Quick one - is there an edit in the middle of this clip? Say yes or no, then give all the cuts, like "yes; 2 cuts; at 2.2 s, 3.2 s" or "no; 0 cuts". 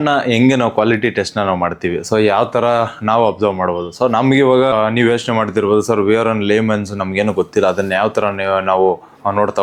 no; 0 cuts